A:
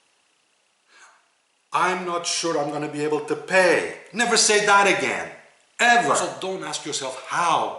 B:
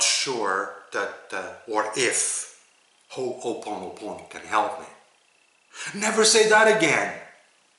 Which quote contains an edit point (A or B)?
A